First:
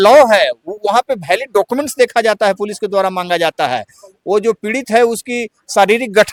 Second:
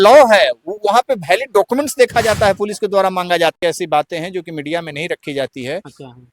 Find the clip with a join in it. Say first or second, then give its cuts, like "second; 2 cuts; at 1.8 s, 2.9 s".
second; 1 cut; at 3.6 s